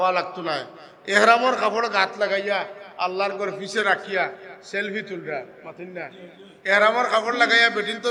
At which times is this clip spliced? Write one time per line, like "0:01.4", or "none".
none